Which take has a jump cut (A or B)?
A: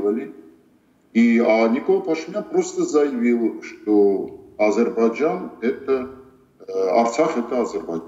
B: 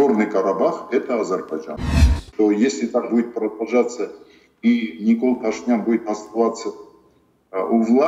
B